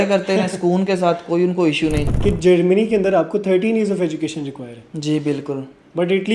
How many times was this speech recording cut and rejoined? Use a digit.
1